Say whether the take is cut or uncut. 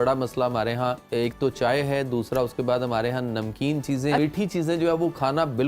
cut